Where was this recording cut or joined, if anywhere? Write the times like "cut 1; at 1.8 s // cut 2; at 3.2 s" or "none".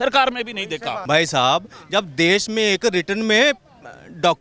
cut 1; at 1.0 s